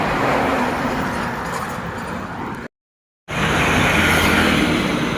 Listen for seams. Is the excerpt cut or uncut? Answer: cut